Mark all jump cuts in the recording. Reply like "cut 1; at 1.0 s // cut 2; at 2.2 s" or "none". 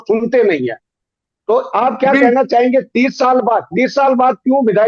none